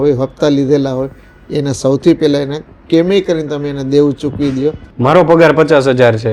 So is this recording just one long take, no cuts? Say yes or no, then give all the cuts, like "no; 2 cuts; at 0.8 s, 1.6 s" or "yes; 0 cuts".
no; 1 cut; at 4.8 s